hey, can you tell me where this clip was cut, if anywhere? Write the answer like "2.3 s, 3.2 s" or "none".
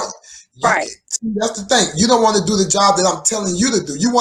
none